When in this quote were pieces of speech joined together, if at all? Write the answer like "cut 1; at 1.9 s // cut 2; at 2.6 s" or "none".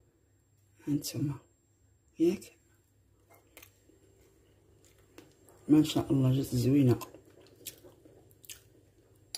none